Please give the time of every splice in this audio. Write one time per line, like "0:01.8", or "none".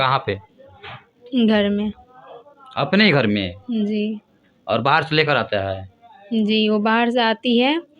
none